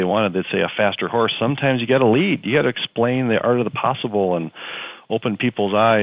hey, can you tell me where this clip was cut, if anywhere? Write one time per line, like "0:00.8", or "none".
none